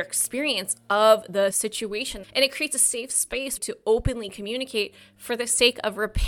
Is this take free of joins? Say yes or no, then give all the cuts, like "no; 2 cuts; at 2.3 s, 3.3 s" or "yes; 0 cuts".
no; 2 cuts; at 1.6 s, 3.6 s